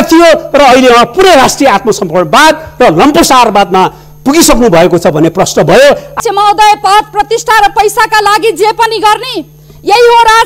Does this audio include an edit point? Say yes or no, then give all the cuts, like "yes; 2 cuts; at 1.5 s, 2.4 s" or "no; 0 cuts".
yes; 1 cut; at 6.2 s